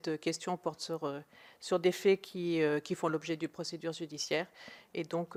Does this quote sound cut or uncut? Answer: uncut